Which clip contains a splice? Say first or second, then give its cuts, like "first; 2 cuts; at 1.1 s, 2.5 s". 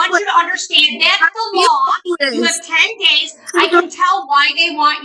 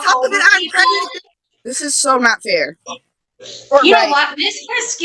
second; 1 cut; at 1.2 s